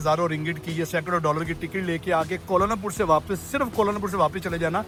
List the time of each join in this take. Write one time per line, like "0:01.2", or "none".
none

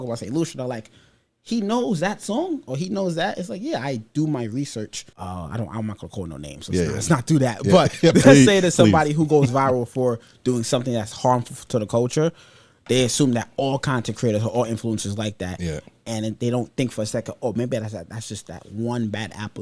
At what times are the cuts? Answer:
0:05.0

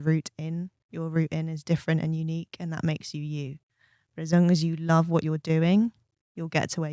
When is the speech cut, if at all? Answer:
none

